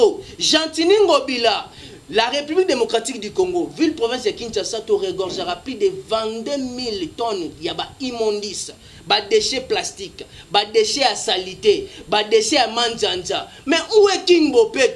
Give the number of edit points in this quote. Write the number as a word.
zero